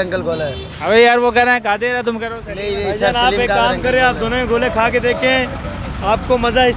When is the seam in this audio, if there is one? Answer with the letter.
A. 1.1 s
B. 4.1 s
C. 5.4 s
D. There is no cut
D